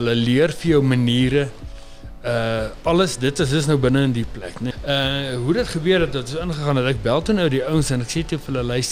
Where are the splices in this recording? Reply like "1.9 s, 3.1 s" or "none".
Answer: 4.7 s